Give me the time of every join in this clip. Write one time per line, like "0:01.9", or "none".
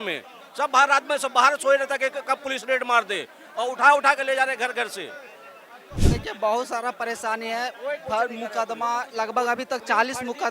0:06.0